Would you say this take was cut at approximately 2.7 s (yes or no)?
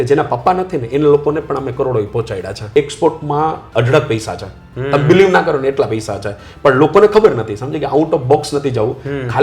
yes